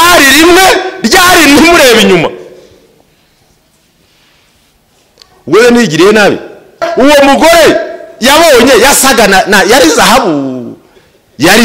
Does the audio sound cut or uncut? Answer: cut